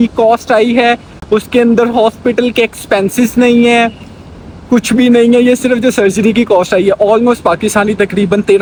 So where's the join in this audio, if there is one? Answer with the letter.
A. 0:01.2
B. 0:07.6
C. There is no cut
C